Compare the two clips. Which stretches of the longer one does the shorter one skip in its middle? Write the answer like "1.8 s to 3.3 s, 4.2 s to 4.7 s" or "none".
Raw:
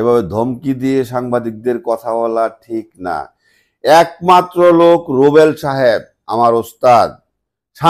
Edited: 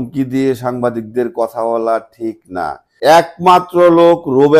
3.3 s to 3.7 s